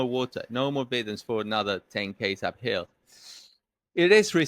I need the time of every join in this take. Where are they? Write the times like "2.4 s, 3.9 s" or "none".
none